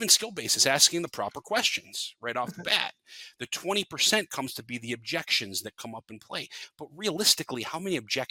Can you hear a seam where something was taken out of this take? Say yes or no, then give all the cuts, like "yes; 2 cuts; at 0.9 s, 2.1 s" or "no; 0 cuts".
no; 0 cuts